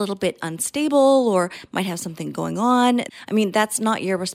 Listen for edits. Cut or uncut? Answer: cut